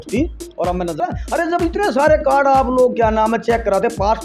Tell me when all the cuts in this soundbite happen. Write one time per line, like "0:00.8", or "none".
0:01.0